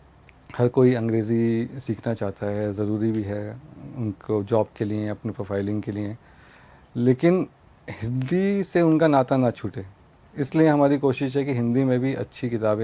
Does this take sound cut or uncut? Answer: uncut